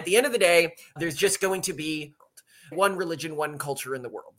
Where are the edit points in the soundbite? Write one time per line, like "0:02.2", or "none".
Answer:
0:02.4